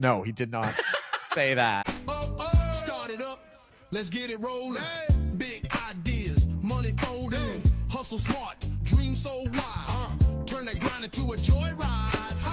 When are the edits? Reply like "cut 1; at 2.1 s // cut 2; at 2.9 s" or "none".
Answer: cut 1; at 1.8 s